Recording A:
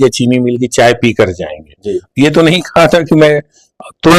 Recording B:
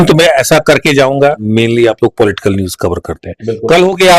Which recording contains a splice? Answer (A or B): B